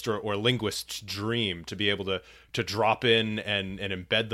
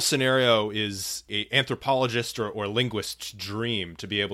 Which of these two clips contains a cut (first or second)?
second